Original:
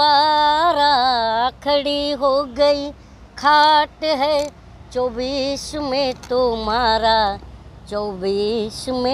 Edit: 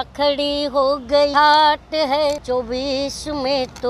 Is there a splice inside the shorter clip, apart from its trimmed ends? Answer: yes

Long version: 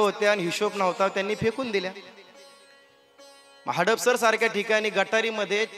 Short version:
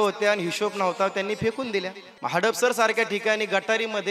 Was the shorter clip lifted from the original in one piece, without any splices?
no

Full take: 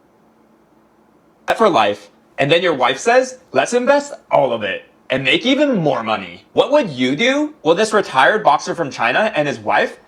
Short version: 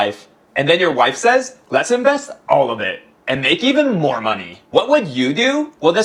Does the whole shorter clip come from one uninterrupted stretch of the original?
yes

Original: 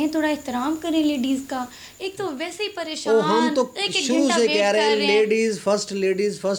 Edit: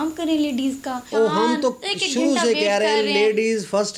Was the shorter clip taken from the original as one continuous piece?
no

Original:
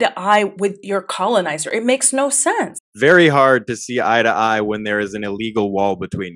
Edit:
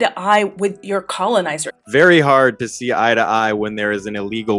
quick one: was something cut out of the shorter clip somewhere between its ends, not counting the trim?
yes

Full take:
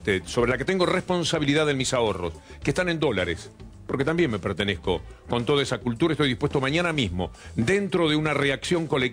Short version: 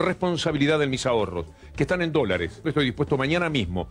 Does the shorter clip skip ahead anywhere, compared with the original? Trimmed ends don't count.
yes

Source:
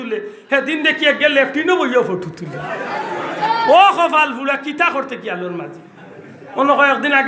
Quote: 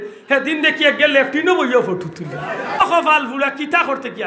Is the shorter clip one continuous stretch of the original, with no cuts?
no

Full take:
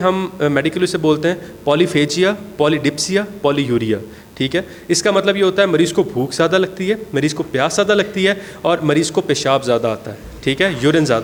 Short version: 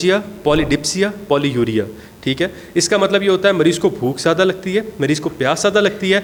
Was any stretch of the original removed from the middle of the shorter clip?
no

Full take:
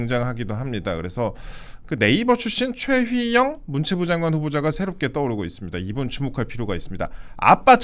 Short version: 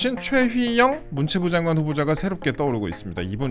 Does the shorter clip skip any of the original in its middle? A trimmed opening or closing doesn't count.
no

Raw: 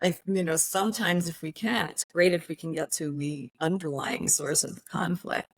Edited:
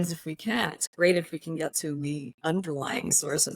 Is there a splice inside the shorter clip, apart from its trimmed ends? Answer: no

